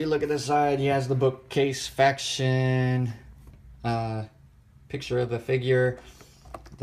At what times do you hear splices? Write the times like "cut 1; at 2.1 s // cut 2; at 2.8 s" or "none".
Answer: cut 1; at 4.4 s